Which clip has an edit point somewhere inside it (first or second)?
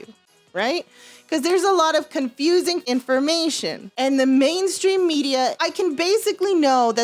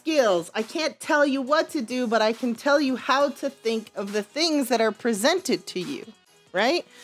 first